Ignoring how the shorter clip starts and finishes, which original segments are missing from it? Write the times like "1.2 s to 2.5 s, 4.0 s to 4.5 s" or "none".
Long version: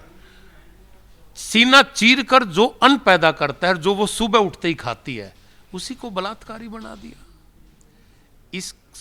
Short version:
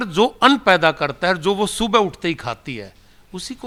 none